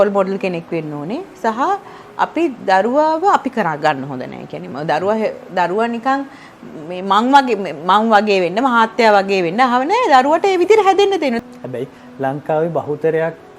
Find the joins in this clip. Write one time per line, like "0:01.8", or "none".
none